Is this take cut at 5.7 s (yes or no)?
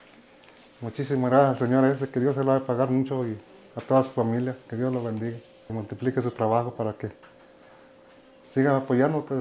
yes